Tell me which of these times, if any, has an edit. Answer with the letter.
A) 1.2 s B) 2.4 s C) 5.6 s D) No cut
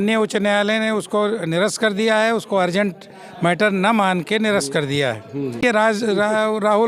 C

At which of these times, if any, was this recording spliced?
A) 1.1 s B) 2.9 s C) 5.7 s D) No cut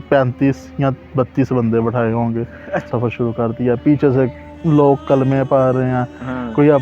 B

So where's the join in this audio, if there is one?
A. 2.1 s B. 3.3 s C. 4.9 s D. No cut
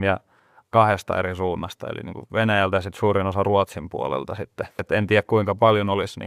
C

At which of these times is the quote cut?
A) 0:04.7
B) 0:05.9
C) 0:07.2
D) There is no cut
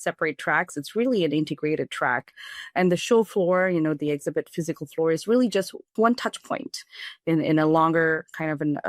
B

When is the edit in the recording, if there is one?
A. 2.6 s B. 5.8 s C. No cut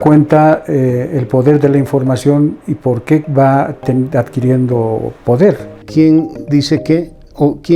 B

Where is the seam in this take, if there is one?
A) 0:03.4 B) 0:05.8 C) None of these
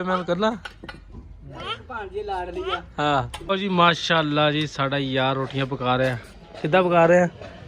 A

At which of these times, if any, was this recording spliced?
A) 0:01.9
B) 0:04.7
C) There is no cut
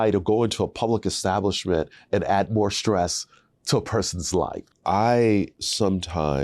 B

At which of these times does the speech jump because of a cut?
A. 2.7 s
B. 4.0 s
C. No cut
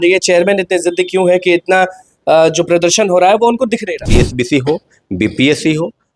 B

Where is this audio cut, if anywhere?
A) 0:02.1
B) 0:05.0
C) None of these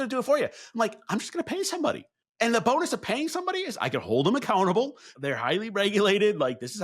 A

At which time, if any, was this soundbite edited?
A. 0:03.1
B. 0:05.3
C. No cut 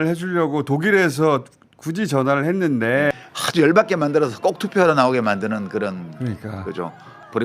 A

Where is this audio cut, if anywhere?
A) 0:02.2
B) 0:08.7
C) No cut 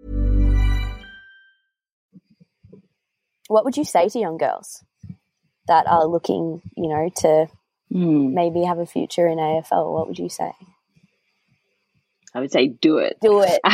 A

